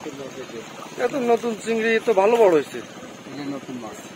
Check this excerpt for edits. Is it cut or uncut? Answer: uncut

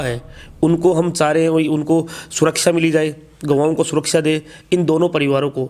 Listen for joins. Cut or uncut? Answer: uncut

